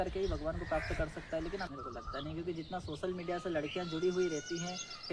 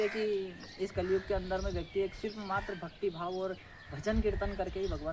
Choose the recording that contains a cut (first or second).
first